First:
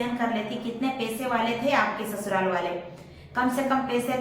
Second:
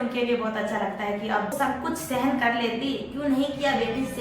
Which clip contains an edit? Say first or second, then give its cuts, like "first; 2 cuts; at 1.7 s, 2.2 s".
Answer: second; 1 cut; at 1.5 s